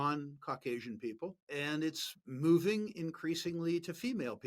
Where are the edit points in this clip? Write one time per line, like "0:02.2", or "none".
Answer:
0:01.4